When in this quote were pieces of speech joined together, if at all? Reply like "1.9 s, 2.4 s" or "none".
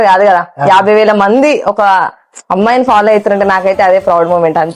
none